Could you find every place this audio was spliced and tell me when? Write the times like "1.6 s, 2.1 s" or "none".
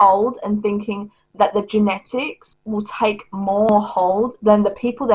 3.7 s

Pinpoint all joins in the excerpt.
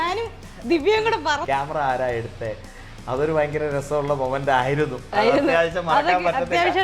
1.4 s

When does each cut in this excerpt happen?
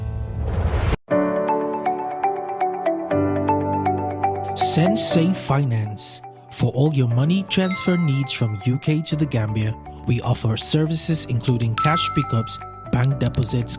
0.9 s

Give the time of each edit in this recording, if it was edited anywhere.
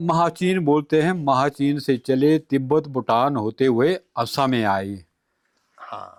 none

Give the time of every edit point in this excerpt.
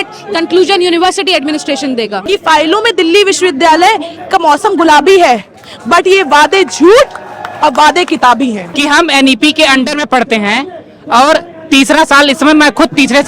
2.2 s, 8.7 s

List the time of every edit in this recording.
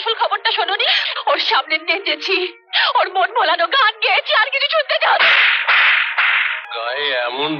1.0 s, 6.5 s

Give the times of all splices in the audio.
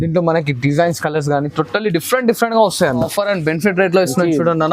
3.1 s

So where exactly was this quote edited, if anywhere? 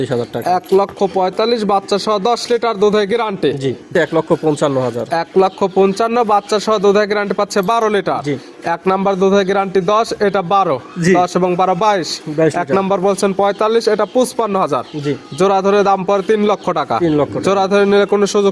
3.9 s

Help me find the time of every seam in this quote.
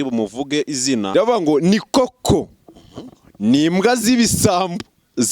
1.1 s

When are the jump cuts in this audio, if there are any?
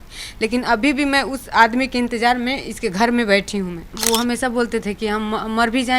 3.9 s

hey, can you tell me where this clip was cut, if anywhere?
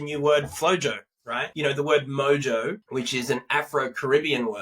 1.4 s, 2.8 s

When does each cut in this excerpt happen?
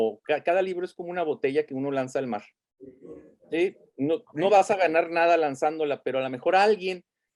none

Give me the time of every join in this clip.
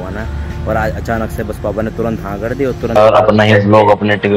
3.0 s

